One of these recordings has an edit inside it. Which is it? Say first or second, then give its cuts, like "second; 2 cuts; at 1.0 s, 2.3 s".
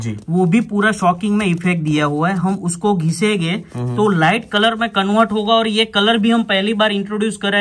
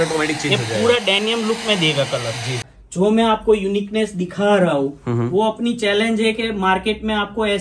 second; 1 cut; at 2.7 s